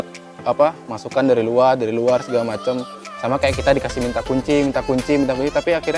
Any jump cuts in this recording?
no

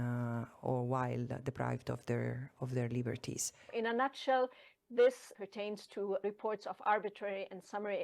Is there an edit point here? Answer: yes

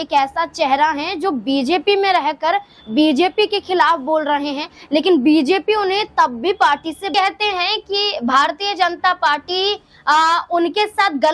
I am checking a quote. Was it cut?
yes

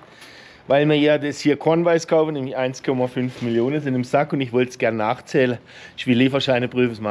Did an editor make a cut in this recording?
no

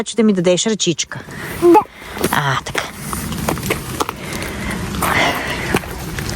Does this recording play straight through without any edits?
yes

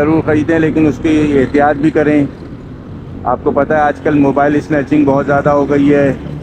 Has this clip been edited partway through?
no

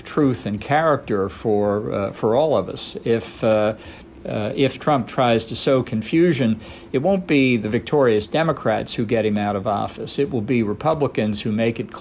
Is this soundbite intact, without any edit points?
yes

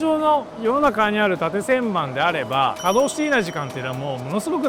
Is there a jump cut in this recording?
no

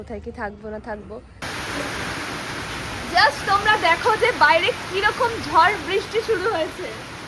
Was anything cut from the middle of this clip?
yes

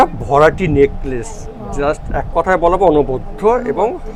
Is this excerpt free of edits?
yes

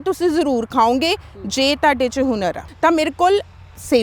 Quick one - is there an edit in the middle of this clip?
yes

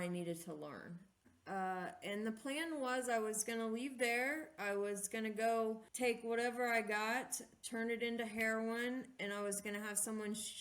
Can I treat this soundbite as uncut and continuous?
no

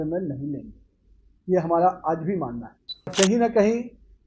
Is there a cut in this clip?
yes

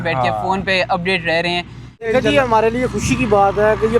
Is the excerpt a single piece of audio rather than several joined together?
no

